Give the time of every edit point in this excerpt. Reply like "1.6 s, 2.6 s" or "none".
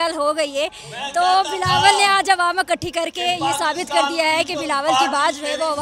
none